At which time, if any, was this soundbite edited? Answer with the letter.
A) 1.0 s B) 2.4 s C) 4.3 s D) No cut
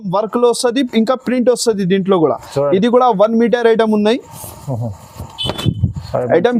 D